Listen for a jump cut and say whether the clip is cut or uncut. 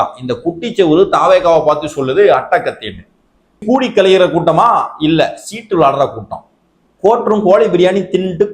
cut